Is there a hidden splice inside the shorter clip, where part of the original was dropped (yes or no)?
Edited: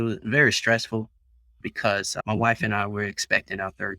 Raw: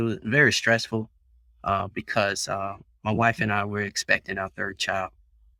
yes